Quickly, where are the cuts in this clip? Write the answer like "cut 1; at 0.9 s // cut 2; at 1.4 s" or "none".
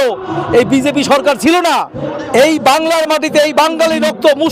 cut 1; at 2.0 s

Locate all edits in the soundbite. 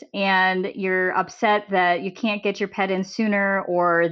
none

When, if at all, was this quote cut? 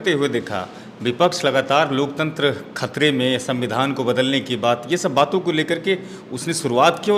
none

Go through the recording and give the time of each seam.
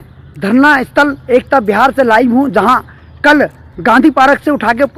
none

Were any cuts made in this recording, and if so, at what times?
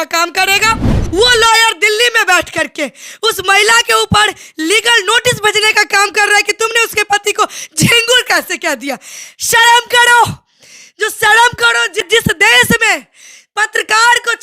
cut 1; at 0.9 s // cut 2; at 12.1 s

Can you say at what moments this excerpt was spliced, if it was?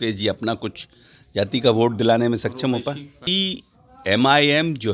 cut 1; at 3.3 s

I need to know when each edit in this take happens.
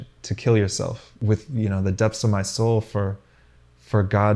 cut 1; at 1.1 s

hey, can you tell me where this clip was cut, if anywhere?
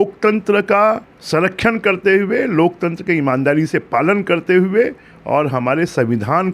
cut 1; at 1.1 s

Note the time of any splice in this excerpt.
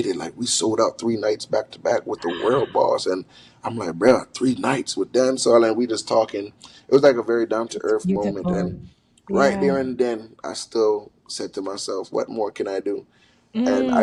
none

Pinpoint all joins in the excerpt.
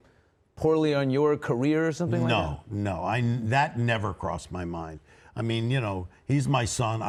none

